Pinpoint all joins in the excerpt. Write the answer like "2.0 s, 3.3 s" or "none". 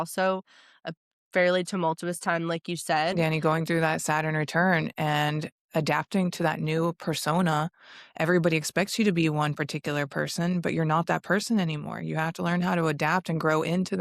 3.4 s